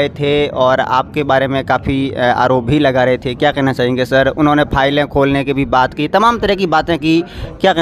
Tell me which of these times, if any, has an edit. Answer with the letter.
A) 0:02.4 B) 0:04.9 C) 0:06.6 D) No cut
D